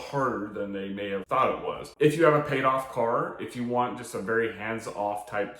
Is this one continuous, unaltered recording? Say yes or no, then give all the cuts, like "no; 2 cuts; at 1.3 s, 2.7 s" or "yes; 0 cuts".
no; 1 cut; at 1.9 s